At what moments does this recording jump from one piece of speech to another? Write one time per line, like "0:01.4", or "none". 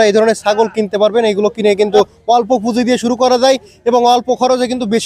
0:02.2